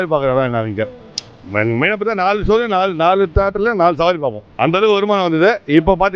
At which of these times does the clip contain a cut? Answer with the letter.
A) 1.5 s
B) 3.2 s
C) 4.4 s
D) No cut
C